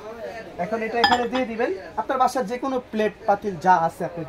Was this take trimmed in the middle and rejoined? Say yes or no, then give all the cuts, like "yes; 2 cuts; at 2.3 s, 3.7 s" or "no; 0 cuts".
no; 0 cuts